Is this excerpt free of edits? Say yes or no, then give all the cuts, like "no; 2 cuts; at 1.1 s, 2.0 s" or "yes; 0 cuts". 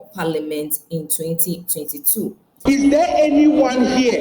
no; 1 cut; at 2.6 s